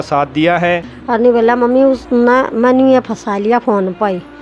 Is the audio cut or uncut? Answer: cut